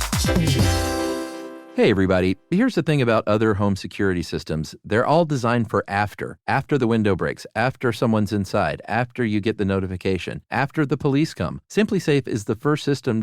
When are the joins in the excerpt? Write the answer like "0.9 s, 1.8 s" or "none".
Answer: 1.5 s